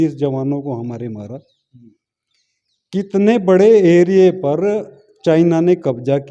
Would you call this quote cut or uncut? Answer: uncut